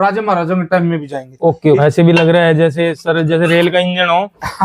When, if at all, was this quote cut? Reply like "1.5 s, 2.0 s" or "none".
1.8 s